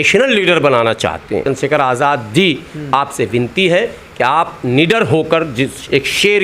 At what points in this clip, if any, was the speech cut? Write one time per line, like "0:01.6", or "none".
0:01.4

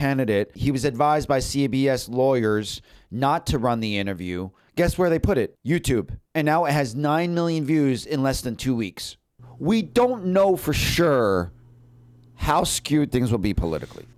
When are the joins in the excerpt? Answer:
none

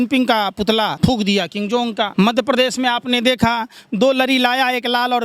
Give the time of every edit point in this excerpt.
0:00.9
0:02.1

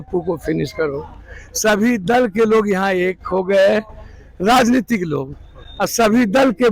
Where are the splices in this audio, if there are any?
none

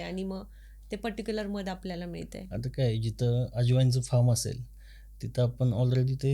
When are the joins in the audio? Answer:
none

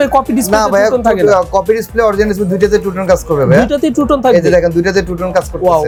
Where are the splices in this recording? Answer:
none

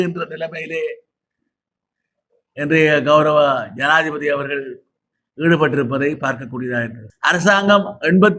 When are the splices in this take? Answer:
0:07.0

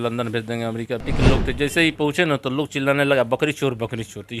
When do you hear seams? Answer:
0:01.0

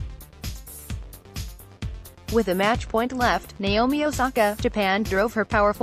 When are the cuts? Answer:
0:00.9
0:02.4

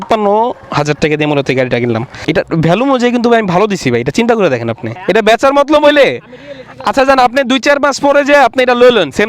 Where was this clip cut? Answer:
0:02.2
0:05.0

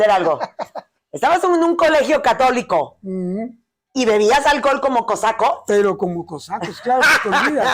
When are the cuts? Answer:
none

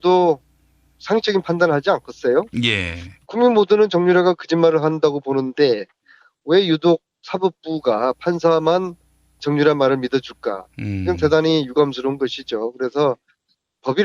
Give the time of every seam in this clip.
0:07.3

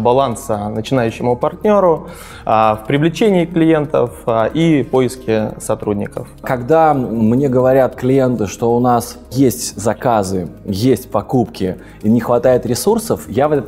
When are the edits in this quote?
0:06.4
0:09.3

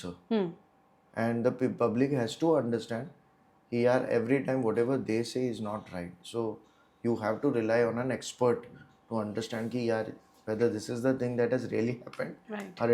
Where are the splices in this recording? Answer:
none

